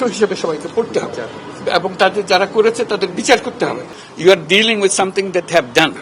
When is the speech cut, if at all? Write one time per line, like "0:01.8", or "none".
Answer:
0:03.9